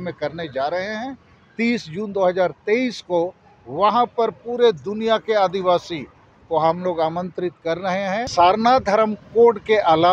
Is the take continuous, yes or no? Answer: no